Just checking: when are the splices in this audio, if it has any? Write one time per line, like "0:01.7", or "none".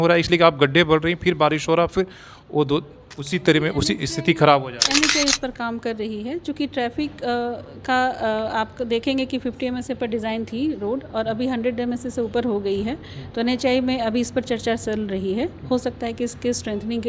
none